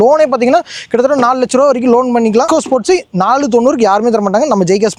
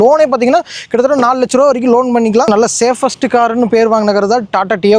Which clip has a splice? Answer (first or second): second